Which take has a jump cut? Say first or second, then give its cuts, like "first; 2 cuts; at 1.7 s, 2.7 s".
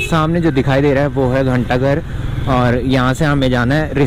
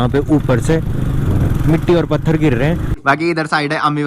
second; 1 cut; at 2.9 s